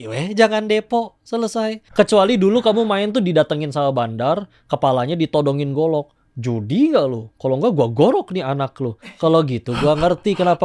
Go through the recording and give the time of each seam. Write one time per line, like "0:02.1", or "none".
0:01.8